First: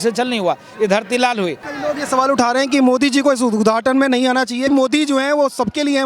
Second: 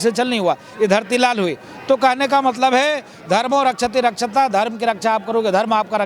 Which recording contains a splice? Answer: first; 2 cuts; at 1.7 s, 4.7 s

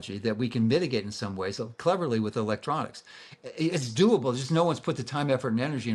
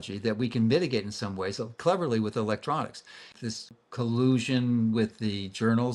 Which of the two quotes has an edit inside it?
second; 1 cut; at 3.4 s

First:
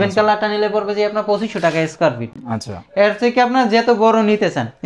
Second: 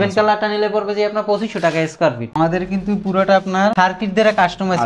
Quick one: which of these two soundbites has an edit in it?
second; 1 cut; at 2.2 s

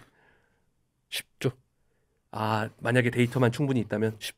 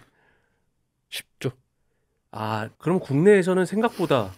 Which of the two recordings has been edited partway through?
second; 1 cut; at 2.7 s

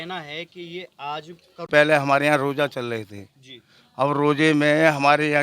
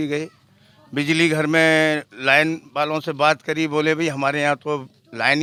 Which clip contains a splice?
first; 1 cut; at 1.7 s

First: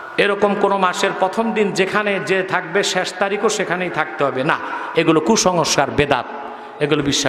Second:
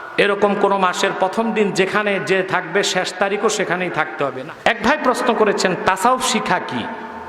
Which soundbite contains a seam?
second; 1 cut; at 4.4 s

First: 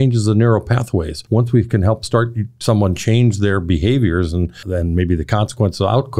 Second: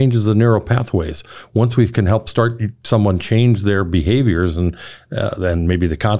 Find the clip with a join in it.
first; 2 cuts; at 1.2 s, 4.6 s

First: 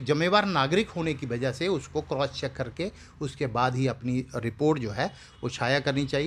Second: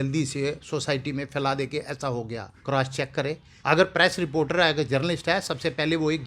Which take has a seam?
second; 2 cuts; at 2.5 s, 3.5 s

